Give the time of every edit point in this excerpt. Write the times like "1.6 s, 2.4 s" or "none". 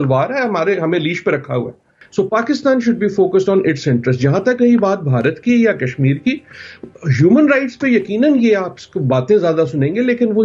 2.0 s

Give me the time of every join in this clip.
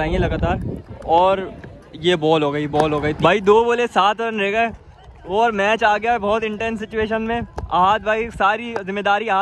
3.2 s

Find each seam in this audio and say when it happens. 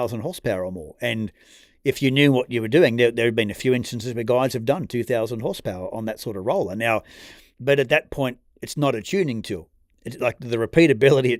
none

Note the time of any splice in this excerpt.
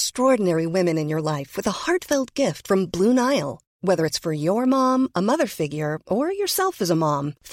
none

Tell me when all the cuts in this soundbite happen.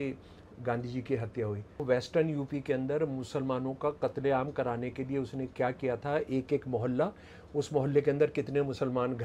1.8 s

